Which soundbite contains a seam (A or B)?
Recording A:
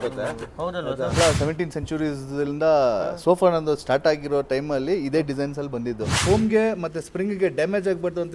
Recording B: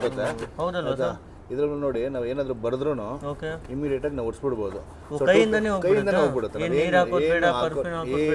A